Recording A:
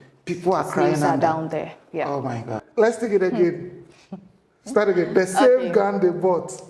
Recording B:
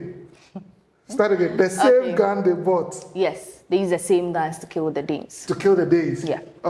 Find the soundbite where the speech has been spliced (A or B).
A